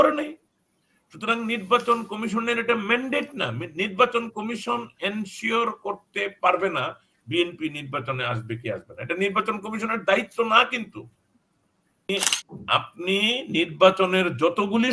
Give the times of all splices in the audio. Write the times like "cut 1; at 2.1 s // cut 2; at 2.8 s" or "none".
cut 1; at 12.1 s

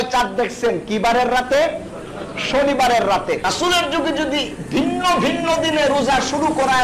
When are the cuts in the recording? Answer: cut 1; at 3.4 s

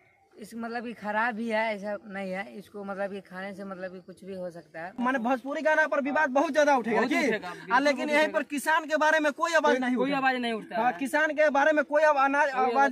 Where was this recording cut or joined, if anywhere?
cut 1; at 4.9 s

